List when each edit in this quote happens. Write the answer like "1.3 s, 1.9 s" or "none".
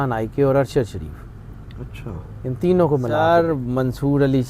3.2 s